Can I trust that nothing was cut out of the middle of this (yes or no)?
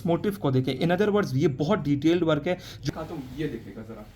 no